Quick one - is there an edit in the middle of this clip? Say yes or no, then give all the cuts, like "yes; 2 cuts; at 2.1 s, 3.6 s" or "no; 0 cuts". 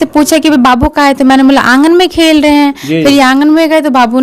no; 0 cuts